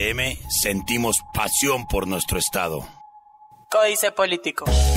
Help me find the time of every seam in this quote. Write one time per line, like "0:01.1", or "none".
0:03.6